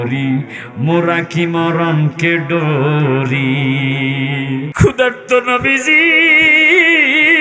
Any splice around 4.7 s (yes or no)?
yes